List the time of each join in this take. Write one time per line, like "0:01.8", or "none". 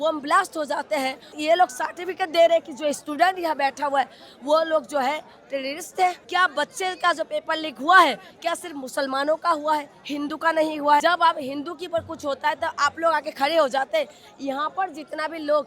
0:01.4
0:06.2
0:11.0